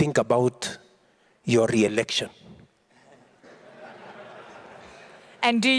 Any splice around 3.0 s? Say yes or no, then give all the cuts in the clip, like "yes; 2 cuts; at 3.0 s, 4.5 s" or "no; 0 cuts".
no; 0 cuts